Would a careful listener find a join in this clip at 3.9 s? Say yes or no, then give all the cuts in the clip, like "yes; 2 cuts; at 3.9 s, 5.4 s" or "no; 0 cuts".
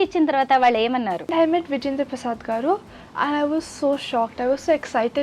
no; 1 cut; at 1.3 s